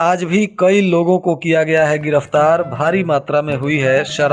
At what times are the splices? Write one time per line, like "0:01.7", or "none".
none